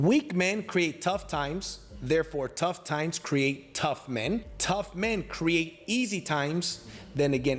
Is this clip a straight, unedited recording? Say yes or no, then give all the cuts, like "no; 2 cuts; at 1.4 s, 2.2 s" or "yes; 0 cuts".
no; 1 cut; at 4.5 s